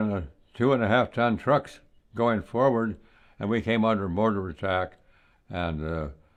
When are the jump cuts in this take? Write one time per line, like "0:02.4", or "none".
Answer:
none

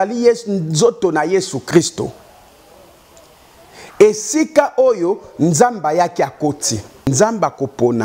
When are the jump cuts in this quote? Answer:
0:07.1

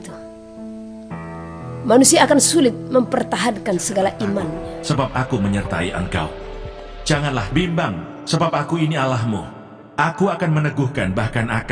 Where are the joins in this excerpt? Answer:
0:04.7

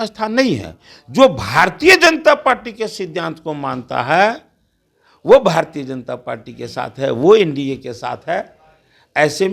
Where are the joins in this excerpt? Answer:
none

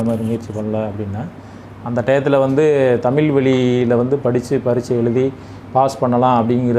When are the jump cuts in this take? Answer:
none

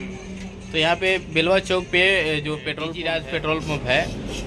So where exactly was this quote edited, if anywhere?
0:02.9

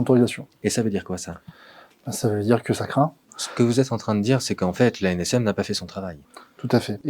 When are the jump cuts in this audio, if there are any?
0:03.3

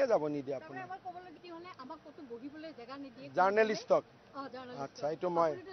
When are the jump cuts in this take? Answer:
0:01.4

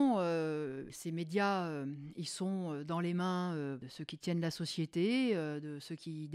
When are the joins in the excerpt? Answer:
0:00.9
0:03.9

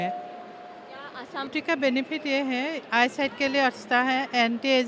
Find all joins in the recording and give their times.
0:01.5

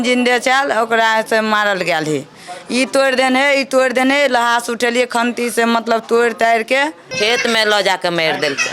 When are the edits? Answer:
0:07.1

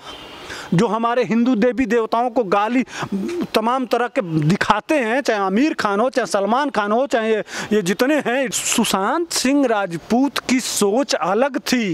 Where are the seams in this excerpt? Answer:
0:08.5

